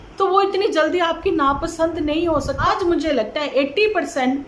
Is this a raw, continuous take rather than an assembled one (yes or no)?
no